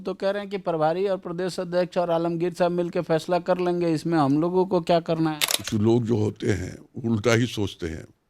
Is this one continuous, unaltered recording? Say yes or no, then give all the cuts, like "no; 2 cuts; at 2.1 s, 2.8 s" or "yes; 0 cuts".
no; 1 cut; at 5.5 s